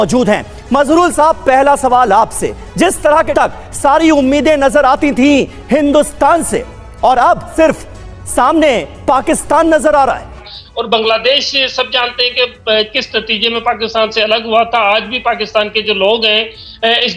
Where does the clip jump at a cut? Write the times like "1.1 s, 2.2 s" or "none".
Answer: 3.3 s, 7.5 s, 10.6 s